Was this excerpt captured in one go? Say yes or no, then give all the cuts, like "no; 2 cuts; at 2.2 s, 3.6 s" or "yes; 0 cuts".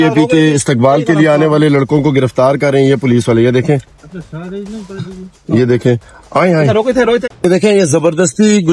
yes; 0 cuts